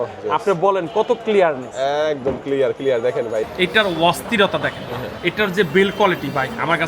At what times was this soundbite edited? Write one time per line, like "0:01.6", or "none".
0:03.4